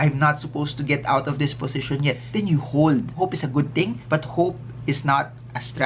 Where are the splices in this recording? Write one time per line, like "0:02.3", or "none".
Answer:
0:03.1